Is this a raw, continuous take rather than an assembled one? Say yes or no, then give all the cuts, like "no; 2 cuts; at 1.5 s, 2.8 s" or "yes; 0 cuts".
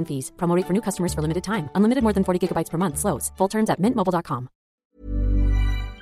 no; 1 cut; at 4.8 s